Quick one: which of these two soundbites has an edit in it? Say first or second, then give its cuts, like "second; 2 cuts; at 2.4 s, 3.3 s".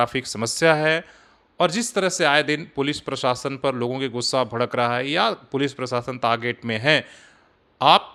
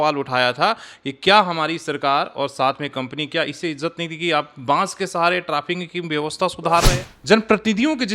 second; 1 cut; at 7.0 s